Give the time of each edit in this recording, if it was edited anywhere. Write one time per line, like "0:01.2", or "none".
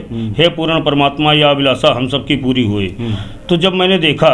none